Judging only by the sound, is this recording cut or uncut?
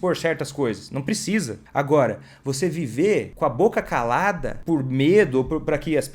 cut